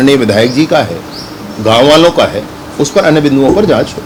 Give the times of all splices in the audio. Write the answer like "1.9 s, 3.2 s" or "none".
none

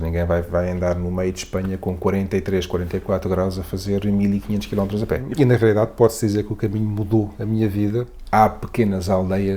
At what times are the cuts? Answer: 5.2 s, 8.2 s

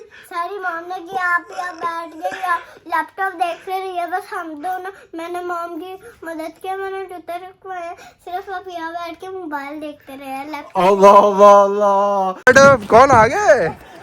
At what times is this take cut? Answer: 12.3 s

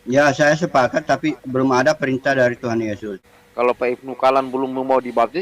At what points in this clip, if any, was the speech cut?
3.1 s

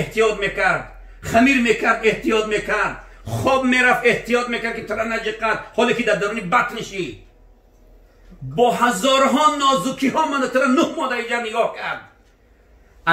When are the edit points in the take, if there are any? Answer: none

